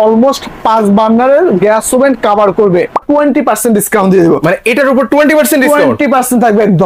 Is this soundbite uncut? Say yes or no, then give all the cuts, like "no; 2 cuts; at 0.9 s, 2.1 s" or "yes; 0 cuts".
no; 1 cut; at 3.0 s